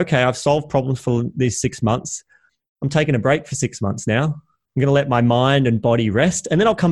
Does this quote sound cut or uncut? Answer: uncut